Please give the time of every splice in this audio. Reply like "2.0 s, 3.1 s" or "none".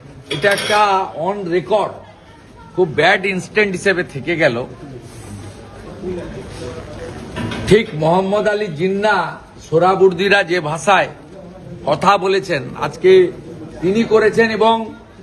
none